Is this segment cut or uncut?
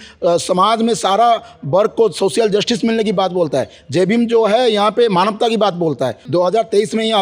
cut